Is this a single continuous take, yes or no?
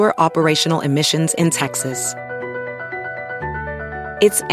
yes